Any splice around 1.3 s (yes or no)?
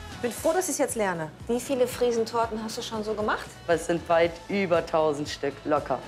yes